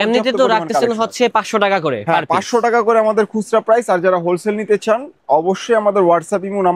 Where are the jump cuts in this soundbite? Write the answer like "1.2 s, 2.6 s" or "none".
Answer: none

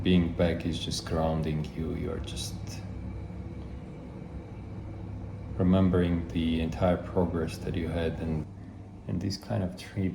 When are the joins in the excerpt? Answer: 8.5 s

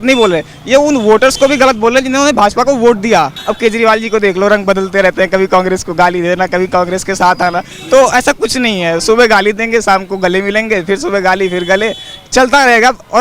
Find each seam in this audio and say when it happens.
3.4 s

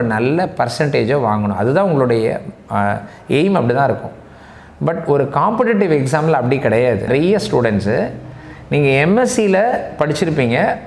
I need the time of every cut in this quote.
7.1 s

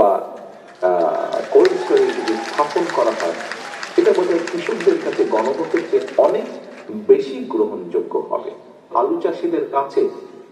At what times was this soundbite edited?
8.9 s

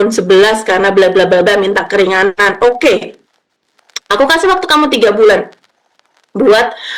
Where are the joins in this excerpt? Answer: none

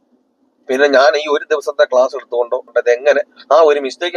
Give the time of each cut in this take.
none

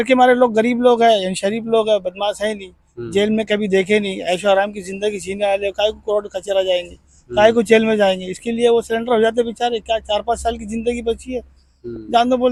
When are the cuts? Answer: none

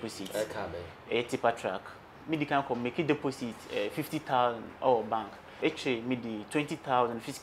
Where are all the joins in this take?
2.2 s, 5.5 s

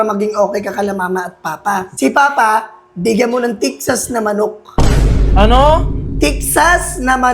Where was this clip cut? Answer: 1.9 s

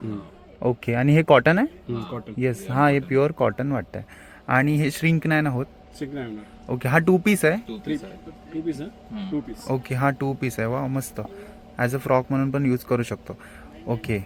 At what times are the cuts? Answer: none

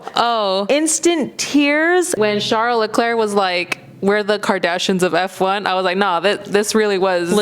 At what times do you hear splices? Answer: 2.1 s

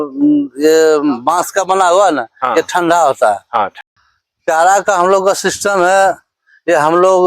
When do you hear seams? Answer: 3.8 s

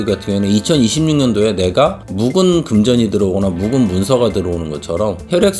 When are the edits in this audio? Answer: none

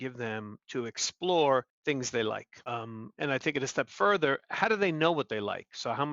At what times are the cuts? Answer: 1.7 s, 2.5 s

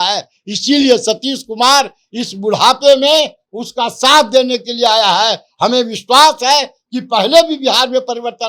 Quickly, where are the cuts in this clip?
none

